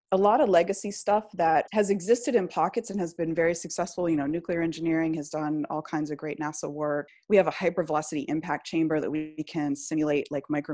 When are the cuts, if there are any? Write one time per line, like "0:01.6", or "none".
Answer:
0:01.7
0:07.1